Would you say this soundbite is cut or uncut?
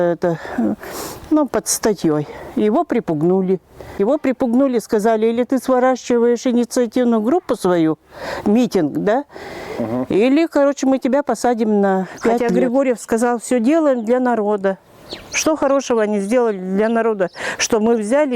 cut